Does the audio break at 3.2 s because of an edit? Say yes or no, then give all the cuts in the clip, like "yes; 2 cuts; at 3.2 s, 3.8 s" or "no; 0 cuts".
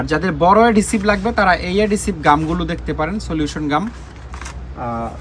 no; 0 cuts